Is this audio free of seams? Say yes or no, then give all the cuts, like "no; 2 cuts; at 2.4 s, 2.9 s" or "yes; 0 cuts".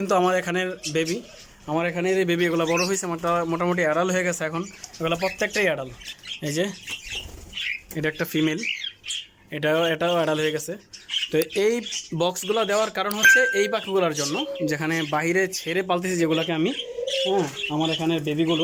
yes; 0 cuts